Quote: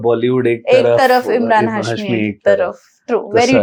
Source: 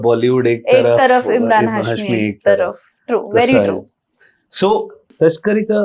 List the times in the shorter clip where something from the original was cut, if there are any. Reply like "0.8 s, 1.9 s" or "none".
none